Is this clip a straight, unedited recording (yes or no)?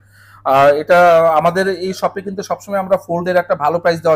yes